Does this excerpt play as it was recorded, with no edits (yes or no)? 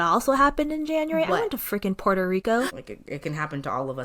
no